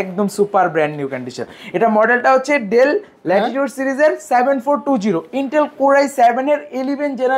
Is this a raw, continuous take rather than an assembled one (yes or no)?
yes